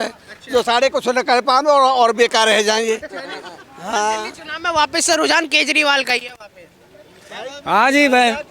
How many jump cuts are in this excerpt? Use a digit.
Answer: 0